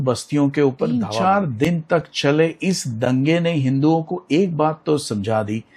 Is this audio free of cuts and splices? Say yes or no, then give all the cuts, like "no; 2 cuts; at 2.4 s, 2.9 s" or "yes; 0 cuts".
no; 1 cut; at 1.1 s